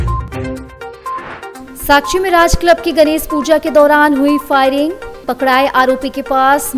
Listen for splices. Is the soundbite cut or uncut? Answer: cut